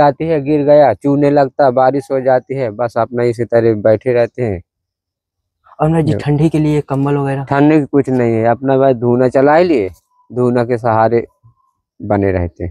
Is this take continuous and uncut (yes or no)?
yes